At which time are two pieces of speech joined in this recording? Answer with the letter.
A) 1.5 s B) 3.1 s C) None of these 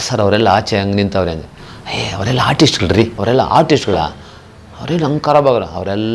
B